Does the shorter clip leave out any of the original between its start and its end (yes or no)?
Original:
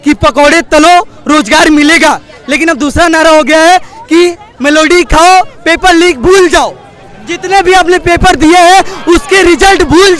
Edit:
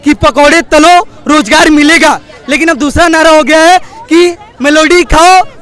no